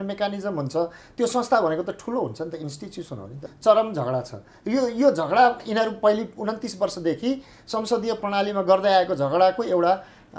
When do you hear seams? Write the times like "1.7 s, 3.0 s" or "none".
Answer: 3.4 s

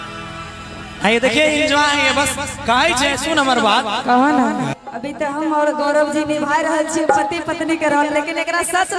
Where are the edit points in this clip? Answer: 4.7 s

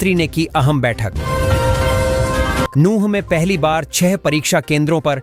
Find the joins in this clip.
none

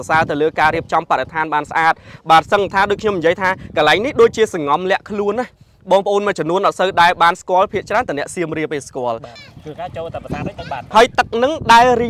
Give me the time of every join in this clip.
9.3 s, 10.7 s

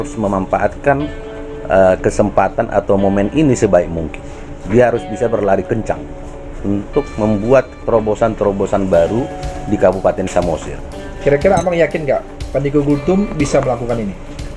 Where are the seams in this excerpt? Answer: 4.6 s, 11.2 s

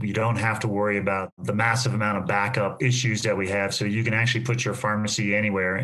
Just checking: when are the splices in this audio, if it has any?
1.4 s, 2.8 s

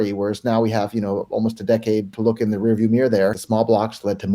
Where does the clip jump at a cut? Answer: 2.1 s, 3.4 s

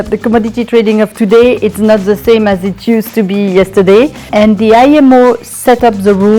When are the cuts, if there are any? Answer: 4.3 s

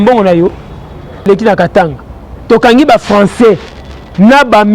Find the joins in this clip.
1.3 s

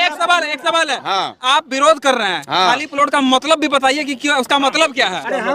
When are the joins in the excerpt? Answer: none

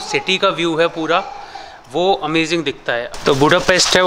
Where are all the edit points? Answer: 3.2 s

